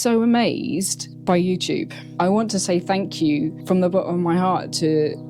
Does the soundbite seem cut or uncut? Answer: cut